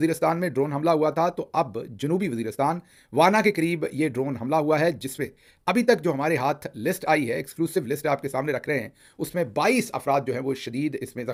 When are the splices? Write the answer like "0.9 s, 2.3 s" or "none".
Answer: none